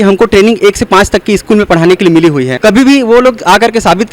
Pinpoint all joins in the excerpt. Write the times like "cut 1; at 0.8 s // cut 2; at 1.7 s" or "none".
cut 1; at 2.5 s